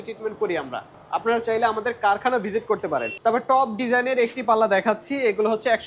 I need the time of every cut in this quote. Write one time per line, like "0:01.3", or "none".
0:01.0
0:03.1